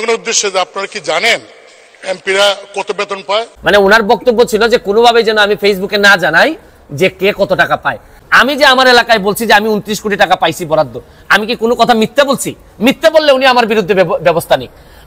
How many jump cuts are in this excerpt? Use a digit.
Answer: 2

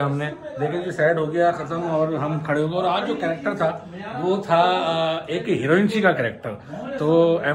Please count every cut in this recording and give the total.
0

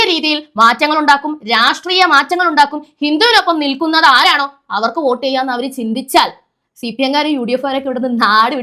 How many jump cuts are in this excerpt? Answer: 0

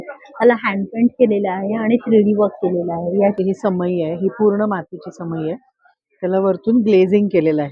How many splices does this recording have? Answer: 1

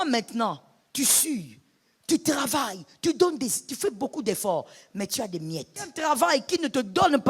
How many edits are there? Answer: 1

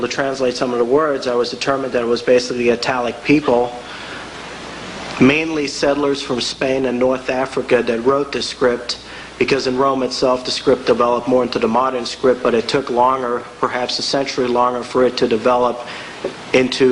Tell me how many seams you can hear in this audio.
0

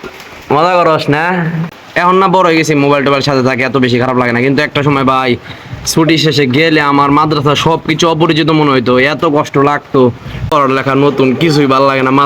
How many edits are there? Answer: 2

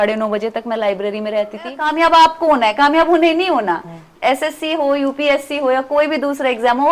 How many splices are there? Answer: 1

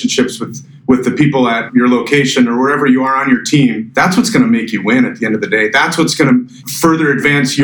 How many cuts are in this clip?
3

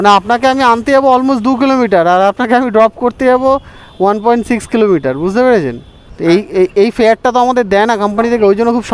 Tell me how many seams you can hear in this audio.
0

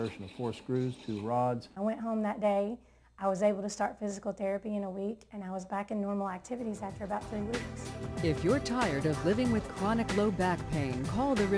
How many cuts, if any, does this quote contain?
1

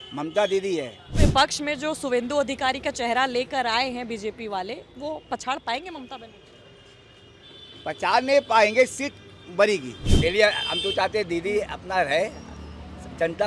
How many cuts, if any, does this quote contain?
2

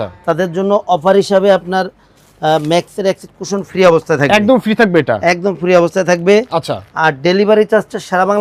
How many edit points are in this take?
0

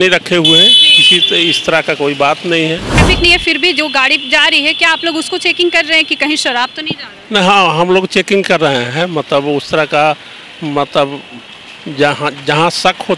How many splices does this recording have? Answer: 1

